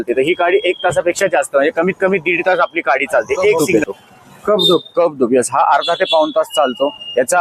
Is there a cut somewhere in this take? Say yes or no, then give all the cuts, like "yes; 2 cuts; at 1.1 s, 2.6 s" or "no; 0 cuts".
yes; 1 cut; at 3.6 s